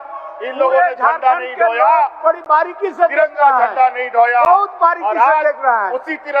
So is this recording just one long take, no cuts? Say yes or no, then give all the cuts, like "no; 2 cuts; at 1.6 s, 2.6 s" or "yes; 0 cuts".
yes; 0 cuts